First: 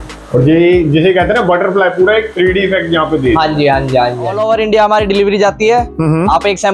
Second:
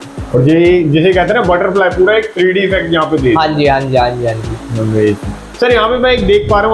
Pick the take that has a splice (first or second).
first